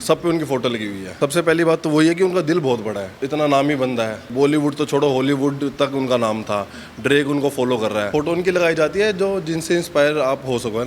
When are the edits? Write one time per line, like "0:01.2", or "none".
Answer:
0:01.1
0:03.1
0:04.3
0:08.1